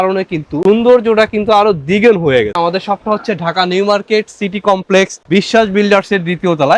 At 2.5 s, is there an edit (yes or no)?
yes